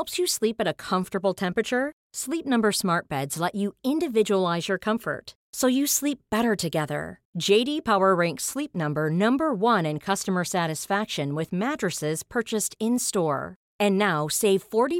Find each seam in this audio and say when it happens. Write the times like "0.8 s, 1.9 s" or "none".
none